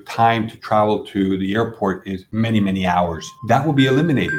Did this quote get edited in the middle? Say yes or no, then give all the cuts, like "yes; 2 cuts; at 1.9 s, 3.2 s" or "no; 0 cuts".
yes; 2 cuts; at 2.2 s, 3.3 s